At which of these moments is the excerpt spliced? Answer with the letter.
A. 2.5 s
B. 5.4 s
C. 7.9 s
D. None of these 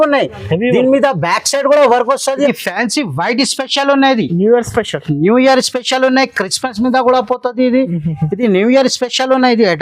A